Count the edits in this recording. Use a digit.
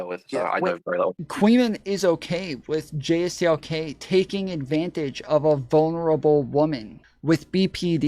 1